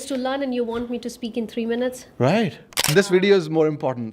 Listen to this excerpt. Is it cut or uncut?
cut